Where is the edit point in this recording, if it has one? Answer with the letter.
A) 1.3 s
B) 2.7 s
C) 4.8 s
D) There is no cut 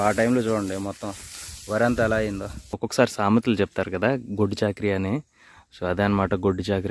B